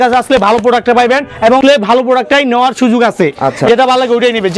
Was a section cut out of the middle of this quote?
yes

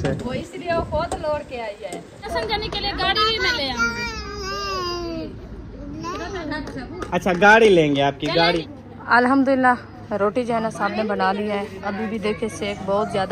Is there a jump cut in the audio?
yes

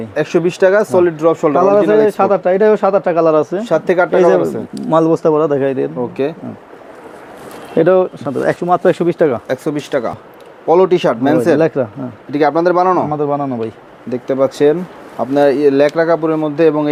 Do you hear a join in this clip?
no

